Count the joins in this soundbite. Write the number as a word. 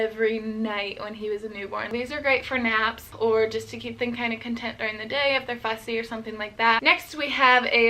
three